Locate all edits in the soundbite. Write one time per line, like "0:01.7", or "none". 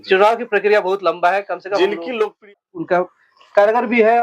0:02.5